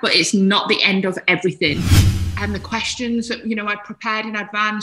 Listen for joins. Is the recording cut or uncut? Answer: cut